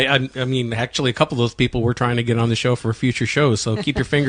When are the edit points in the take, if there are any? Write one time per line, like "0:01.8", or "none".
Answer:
0:03.1